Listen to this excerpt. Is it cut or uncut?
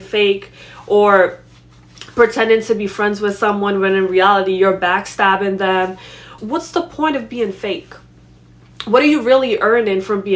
cut